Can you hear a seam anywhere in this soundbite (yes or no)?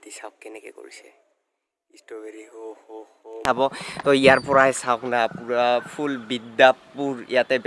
yes